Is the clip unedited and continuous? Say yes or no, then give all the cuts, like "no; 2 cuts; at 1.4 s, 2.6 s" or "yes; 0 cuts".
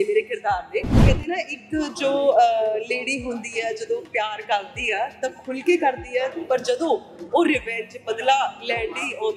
no; 1 cut; at 1.1 s